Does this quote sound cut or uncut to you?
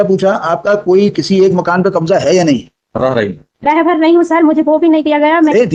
uncut